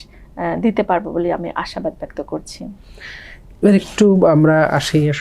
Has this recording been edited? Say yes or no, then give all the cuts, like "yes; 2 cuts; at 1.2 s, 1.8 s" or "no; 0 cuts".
no; 0 cuts